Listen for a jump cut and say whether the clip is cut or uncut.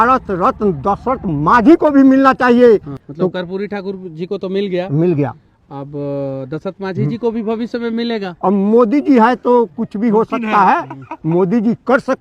uncut